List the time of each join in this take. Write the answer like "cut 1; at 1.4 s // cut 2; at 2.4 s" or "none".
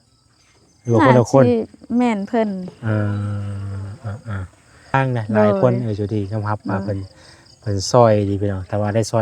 cut 1; at 4.9 s